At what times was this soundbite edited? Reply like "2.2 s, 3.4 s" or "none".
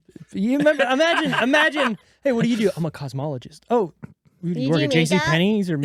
none